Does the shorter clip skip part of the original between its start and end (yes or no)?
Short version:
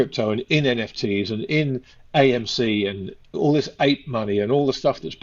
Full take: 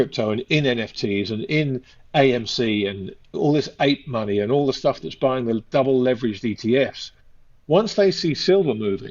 no